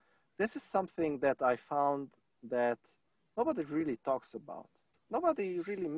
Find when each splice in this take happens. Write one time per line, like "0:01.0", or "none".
0:04.9